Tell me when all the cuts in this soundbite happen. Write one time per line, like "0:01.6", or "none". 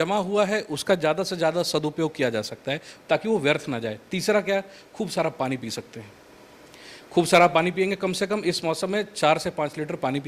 none